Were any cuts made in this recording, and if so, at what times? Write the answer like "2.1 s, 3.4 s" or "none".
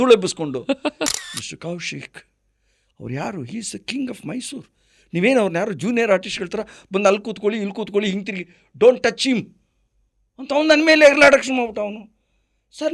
1.2 s